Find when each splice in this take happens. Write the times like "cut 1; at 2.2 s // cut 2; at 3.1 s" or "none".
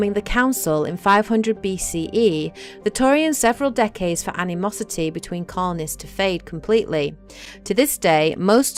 none